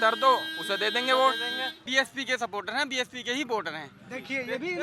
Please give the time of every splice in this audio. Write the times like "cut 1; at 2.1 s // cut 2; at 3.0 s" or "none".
cut 1; at 1.8 s